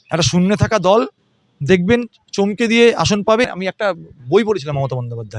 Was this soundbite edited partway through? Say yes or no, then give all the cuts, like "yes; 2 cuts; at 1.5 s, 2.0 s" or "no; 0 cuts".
yes; 1 cut; at 3.4 s